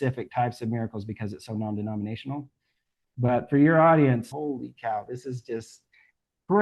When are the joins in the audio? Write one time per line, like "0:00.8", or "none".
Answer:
0:04.3